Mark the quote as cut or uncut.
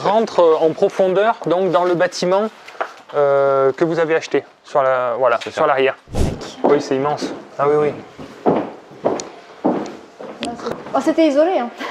cut